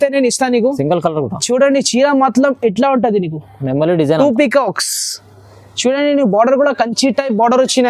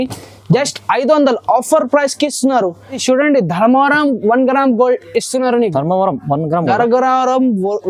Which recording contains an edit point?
second; 1 cut; at 2.9 s

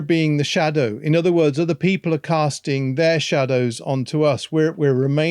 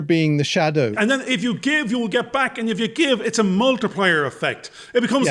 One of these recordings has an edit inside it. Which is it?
second; 1 cut; at 0.9 s

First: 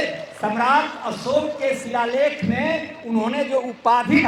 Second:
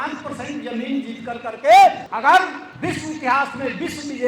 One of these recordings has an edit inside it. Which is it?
second; 1 cut; at 2.3 s

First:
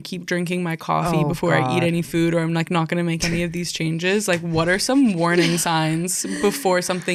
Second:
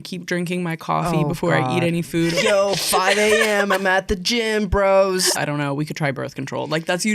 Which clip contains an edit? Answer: second; 2 cuts; at 2.3 s, 5.3 s

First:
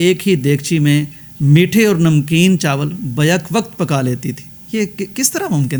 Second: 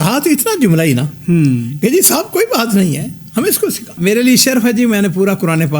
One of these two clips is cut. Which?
second; 1 cut; at 3.9 s

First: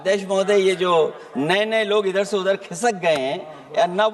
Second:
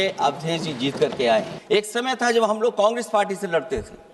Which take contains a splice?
second; 1 cut; at 1.6 s

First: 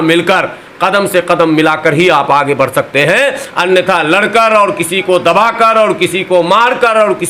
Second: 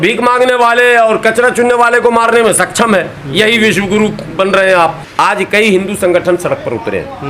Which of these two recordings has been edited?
second; 1 cut; at 5.0 s

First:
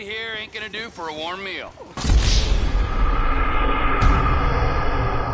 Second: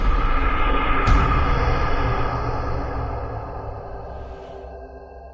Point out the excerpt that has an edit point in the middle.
first; 1 cut; at 1.8 s

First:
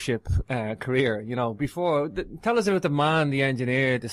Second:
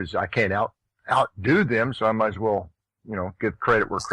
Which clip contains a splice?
second; 1 cut; at 2.4 s

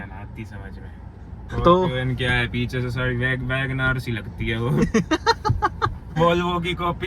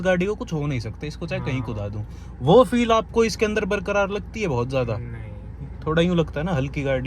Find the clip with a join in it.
first; 2 cuts; at 1.4 s, 6.1 s

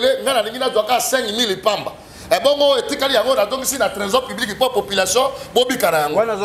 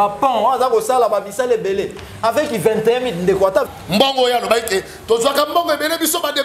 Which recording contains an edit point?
second; 1 cut; at 3.7 s

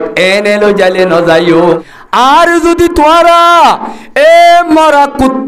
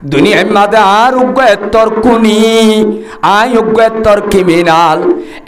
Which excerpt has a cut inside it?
first; 1 cut; at 1.9 s

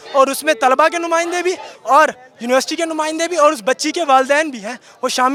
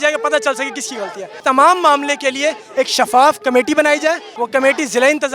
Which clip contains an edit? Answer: second; 2 cuts; at 1.3 s, 4.3 s

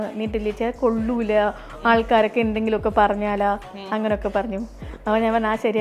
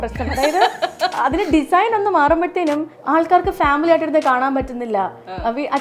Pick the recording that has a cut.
second; 2 cuts; at 1.1 s, 2.9 s

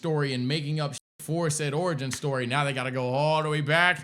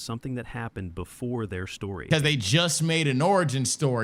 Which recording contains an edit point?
second; 1 cut; at 2.0 s

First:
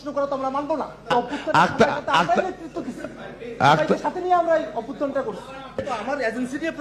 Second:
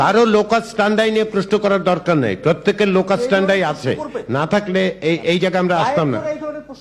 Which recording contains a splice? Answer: first; 2 cuts; at 1.1 s, 5.9 s

